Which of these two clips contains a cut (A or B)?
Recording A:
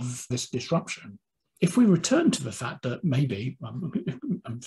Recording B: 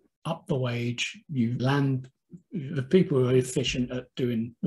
A